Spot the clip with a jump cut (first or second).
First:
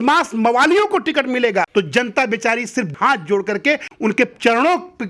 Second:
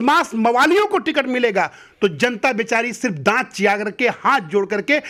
first